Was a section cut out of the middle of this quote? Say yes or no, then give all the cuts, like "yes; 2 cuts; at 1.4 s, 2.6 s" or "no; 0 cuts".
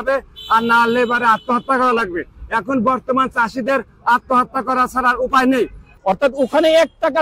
yes; 1 cut; at 5.8 s